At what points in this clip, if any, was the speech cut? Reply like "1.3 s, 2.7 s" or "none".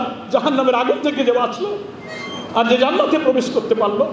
none